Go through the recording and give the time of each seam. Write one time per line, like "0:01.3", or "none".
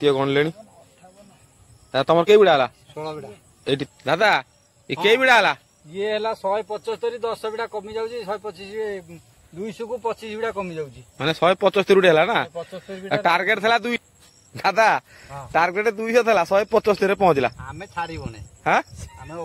0:03.8
0:14.0